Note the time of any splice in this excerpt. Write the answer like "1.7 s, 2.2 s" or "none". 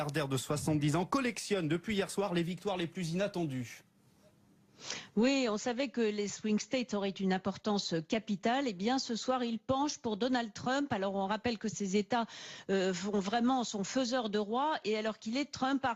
none